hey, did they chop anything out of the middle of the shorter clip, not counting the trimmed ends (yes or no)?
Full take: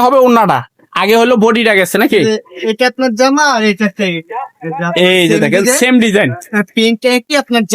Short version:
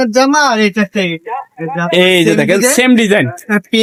no